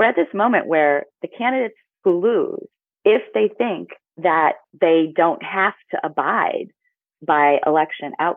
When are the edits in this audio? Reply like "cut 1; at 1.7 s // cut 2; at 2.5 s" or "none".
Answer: none

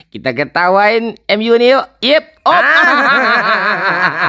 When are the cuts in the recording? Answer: cut 1; at 1.9 s

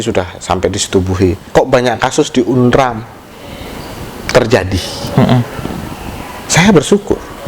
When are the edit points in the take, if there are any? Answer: cut 1; at 1.4 s

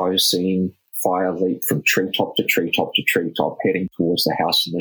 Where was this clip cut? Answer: cut 1; at 3.9 s

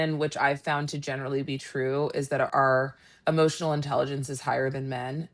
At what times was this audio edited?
cut 1; at 2.5 s

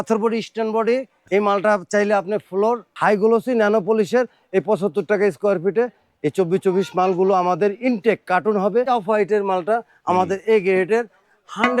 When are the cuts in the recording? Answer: cut 1; at 1.1 s // cut 2; at 2.9 s // cut 3; at 8.9 s

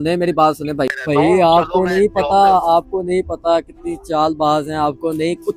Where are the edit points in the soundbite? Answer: cut 1; at 1.0 s

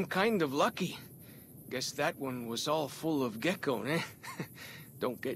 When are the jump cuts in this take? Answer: none

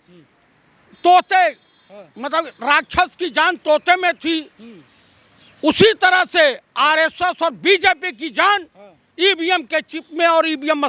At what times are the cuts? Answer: none

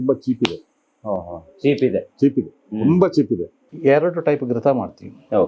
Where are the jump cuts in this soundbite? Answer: none

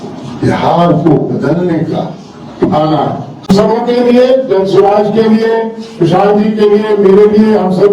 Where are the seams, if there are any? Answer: cut 1; at 3.5 s

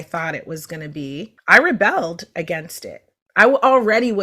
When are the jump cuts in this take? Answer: cut 1; at 1.3 s

